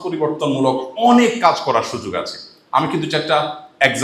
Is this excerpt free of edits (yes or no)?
yes